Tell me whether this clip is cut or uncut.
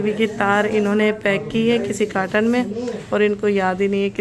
uncut